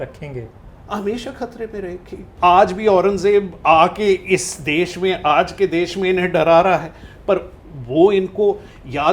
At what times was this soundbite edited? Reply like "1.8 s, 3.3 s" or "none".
2.2 s

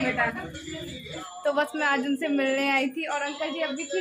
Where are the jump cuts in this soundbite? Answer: 1.1 s

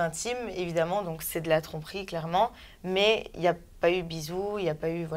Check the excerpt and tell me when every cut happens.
none

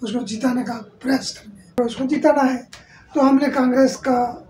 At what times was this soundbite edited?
1.8 s

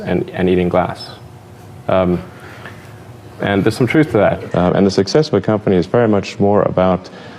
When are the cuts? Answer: 4.4 s

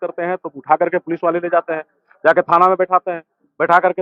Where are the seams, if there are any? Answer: none

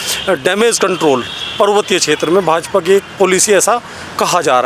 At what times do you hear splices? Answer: none

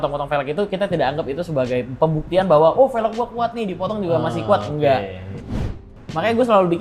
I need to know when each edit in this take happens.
5.8 s

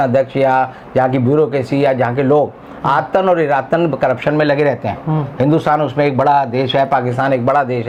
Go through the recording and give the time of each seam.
none

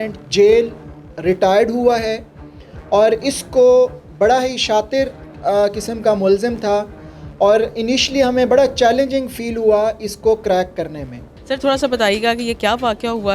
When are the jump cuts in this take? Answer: none

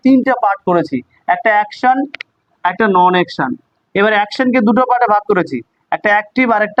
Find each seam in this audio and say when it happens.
none

